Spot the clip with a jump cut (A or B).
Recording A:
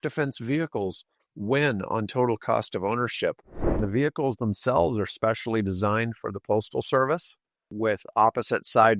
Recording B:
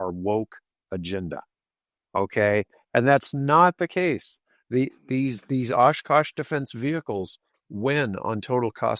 A